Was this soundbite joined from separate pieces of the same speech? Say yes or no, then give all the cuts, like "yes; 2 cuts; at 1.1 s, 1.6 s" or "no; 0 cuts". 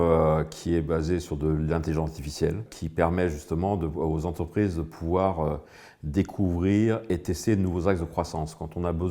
yes; 1 cut; at 2.7 s